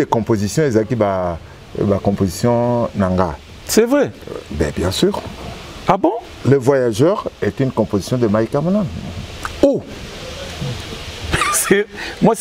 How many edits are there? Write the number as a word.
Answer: zero